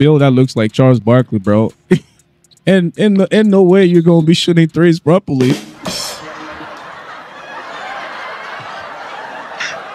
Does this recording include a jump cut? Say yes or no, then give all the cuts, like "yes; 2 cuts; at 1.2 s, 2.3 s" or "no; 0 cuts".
no; 0 cuts